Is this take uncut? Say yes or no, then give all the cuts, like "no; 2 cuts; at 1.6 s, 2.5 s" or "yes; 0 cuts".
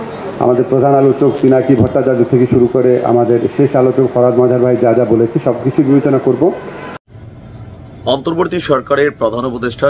no; 1 cut; at 6.9 s